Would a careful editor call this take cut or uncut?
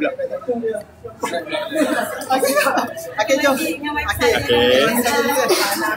uncut